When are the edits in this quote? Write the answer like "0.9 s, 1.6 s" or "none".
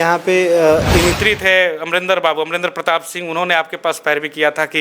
1.2 s

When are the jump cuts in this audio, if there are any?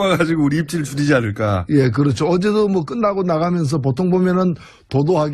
none

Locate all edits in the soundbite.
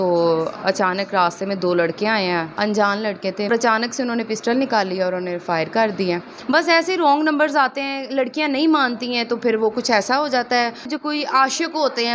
2.5 s, 3.5 s, 6.3 s, 10.9 s

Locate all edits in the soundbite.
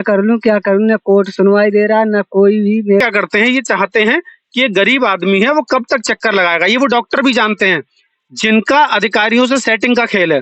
3.0 s

